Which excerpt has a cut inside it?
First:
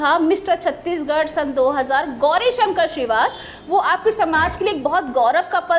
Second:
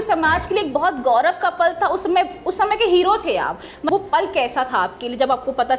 second; 1 cut; at 3.8 s

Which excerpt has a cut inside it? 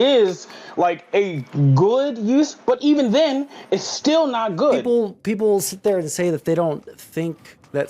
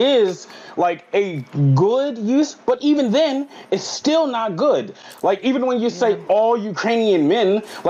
first; 1 cut; at 4.8 s

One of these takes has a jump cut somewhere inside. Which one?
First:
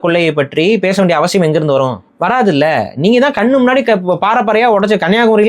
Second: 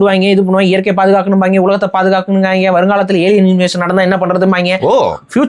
first; 1 cut; at 2.0 s

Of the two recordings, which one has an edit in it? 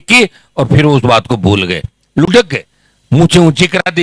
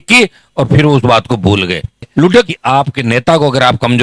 second; 1 cut; at 2.5 s

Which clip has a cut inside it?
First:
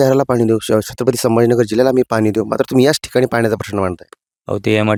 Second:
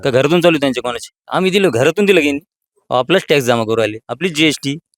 second; 1 cut; at 1.2 s

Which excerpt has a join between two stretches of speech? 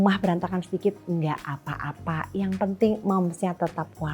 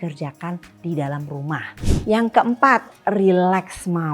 second; 1 cut; at 1.7 s

